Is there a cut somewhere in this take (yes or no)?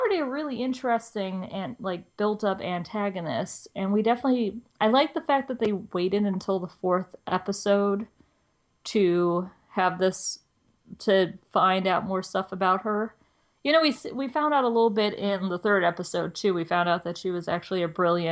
no